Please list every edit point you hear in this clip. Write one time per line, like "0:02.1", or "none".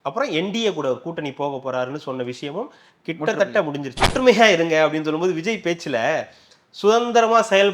0:04.1